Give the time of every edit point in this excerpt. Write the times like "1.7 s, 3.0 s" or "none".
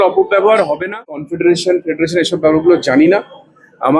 1.3 s